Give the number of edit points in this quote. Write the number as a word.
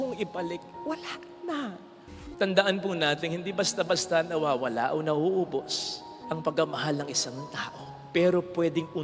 one